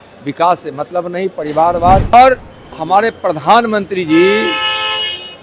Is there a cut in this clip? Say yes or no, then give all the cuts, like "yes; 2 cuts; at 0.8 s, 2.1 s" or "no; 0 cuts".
yes; 1 cut; at 2.1 s